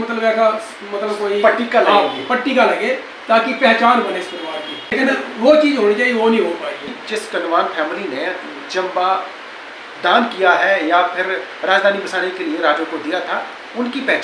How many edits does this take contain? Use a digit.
2